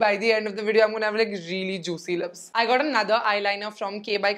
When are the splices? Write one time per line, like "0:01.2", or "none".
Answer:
none